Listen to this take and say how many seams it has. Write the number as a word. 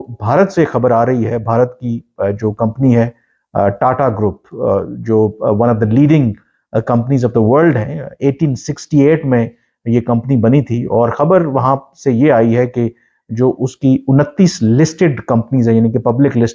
zero